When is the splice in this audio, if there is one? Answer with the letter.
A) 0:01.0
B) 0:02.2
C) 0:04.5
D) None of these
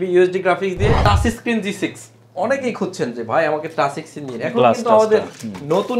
A